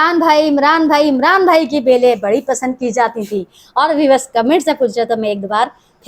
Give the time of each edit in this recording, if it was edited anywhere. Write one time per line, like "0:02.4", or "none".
none

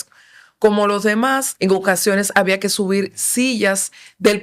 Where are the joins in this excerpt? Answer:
0:01.5

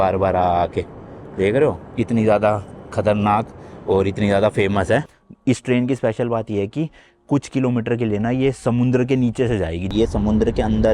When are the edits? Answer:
0:05.2
0:09.9

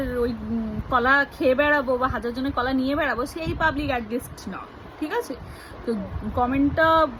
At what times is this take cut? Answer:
none

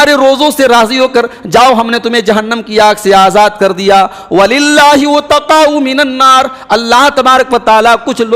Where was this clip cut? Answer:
none

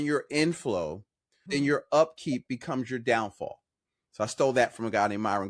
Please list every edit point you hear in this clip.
none

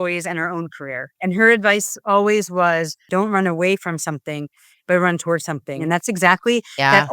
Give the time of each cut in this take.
0:01.1
0:03.1
0:05.8

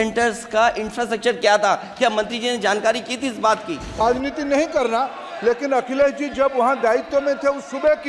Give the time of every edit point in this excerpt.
0:04.0

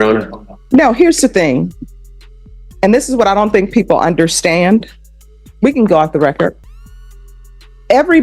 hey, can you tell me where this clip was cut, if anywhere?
none

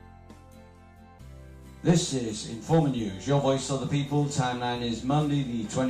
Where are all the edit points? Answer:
0:01.2

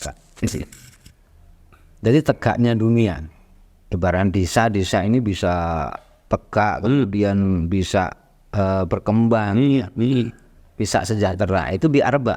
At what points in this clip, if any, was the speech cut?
none

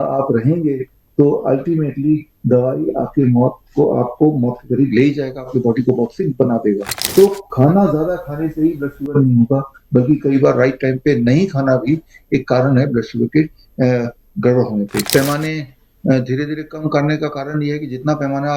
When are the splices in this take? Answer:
0:07.0
0:15.1

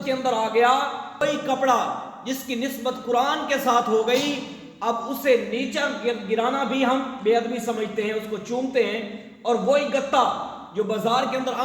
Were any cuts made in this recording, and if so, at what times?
0:01.2

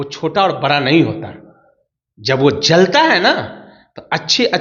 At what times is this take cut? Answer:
none

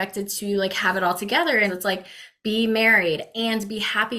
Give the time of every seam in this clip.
0:01.8

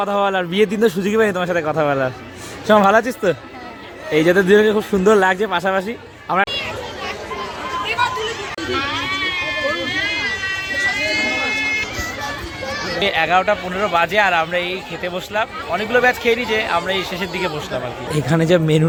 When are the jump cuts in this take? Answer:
none

